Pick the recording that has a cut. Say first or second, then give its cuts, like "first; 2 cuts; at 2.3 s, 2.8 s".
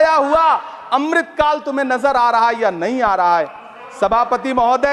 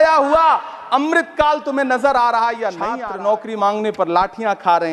second; 1 cut; at 2.9 s